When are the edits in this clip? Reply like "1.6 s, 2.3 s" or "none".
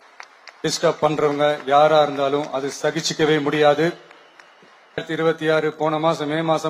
5.0 s

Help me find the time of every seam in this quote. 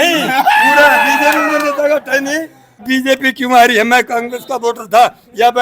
2.8 s

